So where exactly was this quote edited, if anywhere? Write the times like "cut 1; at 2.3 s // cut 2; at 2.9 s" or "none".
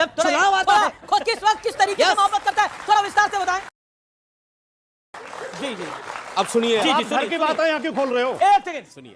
none